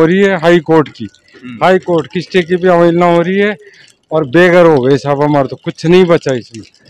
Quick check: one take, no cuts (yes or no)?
yes